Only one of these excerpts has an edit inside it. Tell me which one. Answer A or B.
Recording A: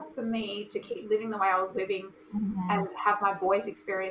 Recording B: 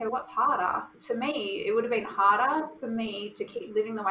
B